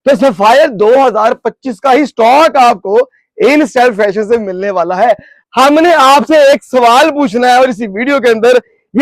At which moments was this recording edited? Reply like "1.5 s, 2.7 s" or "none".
5.3 s